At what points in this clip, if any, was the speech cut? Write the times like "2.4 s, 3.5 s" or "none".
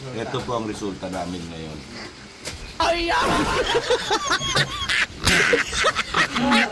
none